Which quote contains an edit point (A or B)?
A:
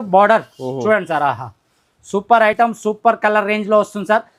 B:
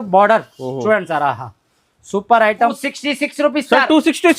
B